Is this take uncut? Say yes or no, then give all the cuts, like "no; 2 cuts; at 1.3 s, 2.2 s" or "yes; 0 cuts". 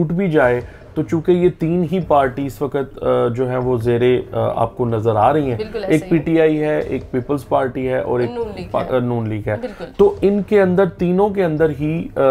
yes; 0 cuts